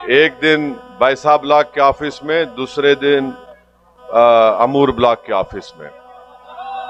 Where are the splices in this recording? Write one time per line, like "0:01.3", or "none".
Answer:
none